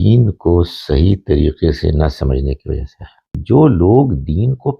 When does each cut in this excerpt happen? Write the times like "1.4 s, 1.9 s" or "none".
3.4 s

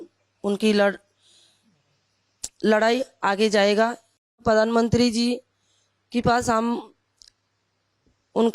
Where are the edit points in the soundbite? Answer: 4.4 s

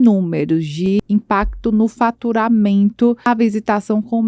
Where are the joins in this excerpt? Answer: 1.0 s, 3.3 s

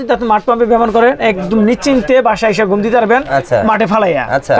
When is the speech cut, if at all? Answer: none

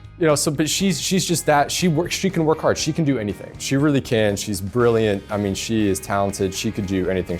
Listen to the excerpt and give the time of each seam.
none

